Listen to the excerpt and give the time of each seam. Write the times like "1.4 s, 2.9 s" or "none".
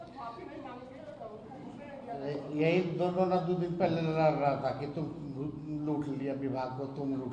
none